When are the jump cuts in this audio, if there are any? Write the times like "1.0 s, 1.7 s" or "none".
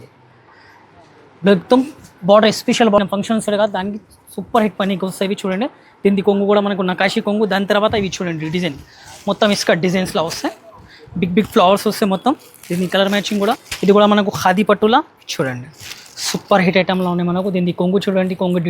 3.0 s, 13.7 s